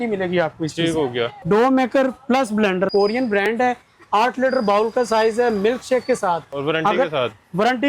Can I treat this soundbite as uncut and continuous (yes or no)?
no